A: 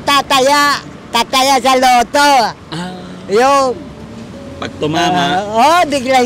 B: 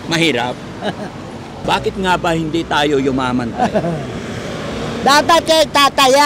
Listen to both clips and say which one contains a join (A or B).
B